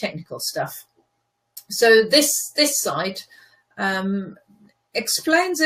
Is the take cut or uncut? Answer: uncut